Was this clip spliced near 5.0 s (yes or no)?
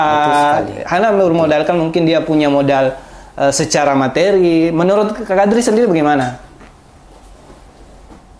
no